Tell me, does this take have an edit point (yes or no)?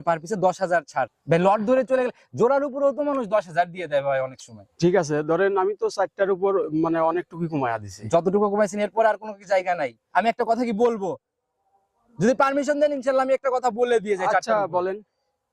no